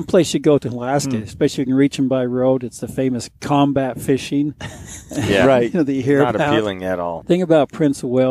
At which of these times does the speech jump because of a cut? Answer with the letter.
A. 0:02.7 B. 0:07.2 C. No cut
B